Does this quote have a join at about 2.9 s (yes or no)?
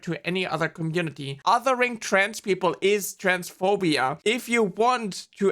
no